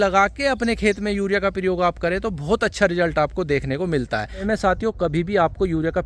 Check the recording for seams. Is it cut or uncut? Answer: cut